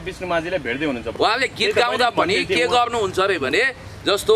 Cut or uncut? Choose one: cut